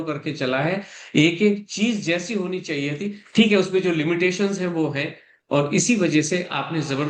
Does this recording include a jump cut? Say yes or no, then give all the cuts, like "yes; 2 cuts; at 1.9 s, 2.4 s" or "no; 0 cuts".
no; 0 cuts